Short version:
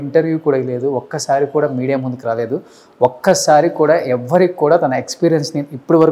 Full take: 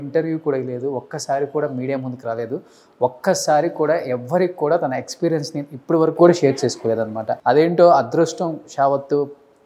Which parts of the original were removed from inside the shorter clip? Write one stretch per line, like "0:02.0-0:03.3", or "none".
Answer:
none